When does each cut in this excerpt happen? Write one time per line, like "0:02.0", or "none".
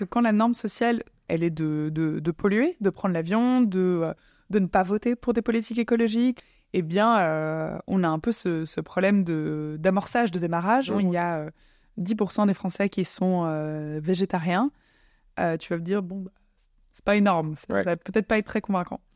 0:01.2
0:06.5
0:11.0